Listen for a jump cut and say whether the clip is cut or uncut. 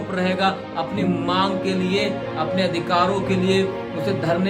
uncut